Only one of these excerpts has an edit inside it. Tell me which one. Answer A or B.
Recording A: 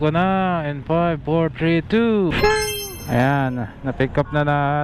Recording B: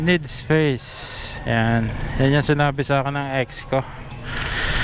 A